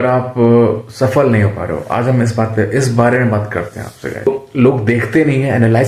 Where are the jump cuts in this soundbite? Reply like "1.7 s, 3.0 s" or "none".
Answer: 4.3 s